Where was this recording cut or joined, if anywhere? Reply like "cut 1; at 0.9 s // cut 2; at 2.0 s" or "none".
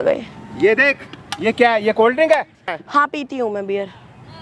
cut 1; at 2.7 s